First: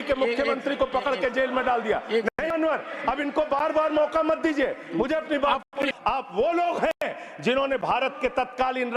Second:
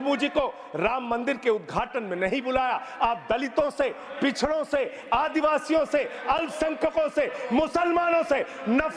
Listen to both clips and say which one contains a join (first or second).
first